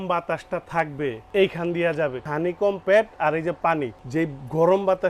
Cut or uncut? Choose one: cut